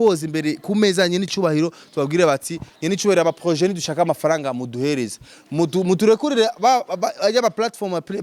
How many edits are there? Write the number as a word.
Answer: zero